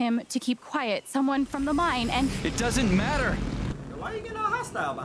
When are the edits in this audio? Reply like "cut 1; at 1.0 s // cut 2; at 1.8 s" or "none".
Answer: cut 1; at 3.8 s